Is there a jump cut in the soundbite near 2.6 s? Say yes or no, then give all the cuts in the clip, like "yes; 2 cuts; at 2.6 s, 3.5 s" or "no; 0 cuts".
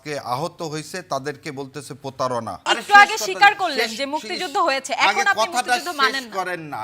yes; 1 cut; at 2.6 s